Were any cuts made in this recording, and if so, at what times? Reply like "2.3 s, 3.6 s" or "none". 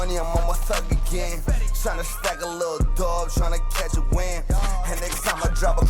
3.3 s